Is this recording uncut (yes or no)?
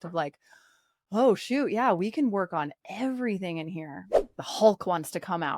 no